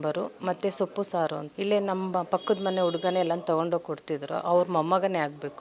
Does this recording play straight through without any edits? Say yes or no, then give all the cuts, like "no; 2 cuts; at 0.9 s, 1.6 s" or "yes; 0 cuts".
yes; 0 cuts